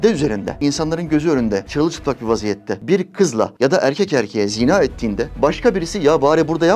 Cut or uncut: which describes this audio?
uncut